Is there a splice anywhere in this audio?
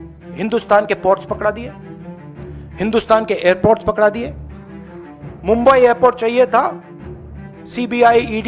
no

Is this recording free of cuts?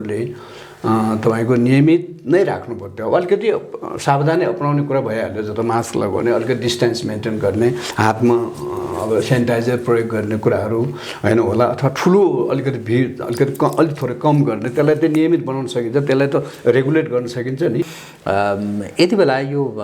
no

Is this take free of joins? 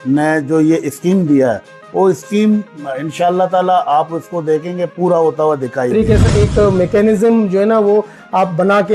no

